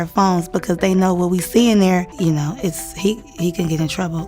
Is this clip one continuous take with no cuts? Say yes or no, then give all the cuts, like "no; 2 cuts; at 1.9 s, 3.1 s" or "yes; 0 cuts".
no; 1 cut; at 2.1 s